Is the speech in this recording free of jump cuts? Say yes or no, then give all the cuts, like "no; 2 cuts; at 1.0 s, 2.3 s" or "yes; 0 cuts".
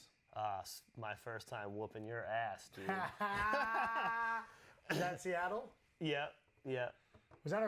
yes; 0 cuts